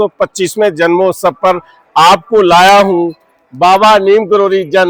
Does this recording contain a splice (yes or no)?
no